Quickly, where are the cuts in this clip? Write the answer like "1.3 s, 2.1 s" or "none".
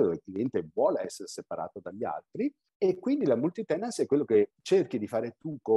2.7 s, 4.6 s